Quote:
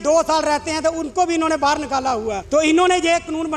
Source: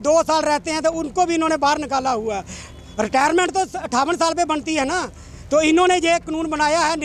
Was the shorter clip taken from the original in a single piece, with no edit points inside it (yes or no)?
no